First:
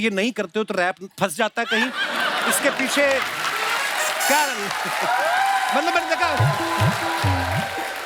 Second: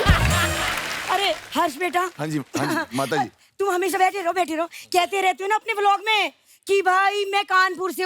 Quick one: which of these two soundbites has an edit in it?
second; 1 cut; at 0.9 s

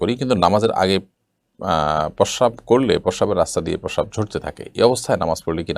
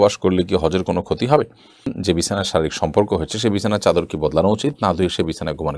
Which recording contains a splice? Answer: second; 1 cut; at 2.0 s

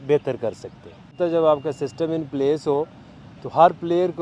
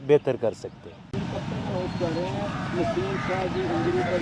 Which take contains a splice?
first; 1 cut; at 1.2 s

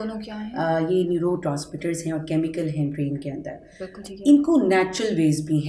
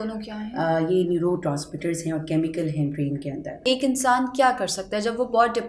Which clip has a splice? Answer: second; 1 cut; at 3.6 s

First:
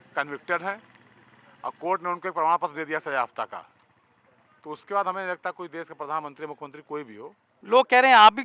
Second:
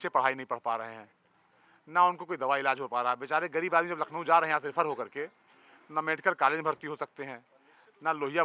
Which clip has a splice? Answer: first; 1 cut; at 7.5 s

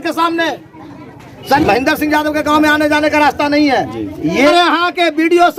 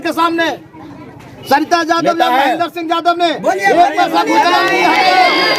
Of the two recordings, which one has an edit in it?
first; 2 cuts; at 1.6 s, 4.5 s

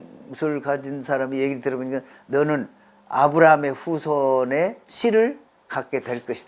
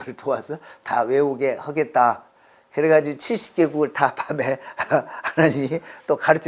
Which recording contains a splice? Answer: first; 1 cut; at 5.5 s

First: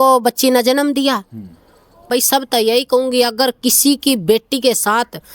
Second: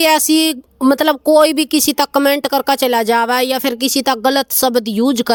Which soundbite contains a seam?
first; 1 cut; at 2.1 s

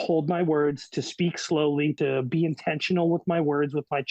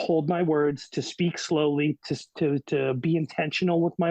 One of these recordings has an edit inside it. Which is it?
first; 1 cut; at 2.0 s

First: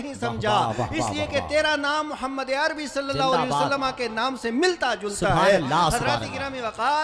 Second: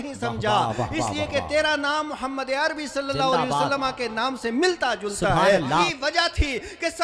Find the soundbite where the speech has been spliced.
second; 1 cut; at 5.9 s

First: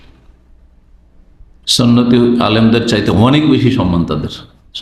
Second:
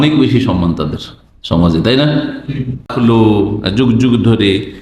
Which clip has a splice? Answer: second; 1 cut; at 2.9 s

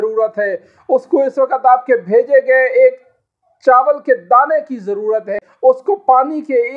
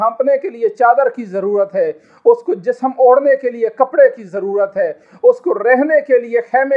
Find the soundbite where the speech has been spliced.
first; 1 cut; at 5.5 s

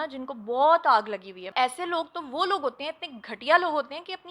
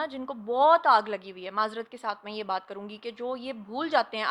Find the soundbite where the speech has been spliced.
first; 1 cut; at 1.5 s

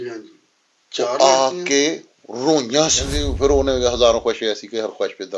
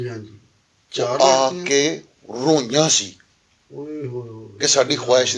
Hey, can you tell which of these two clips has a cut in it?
first; 1 cut; at 3.1 s

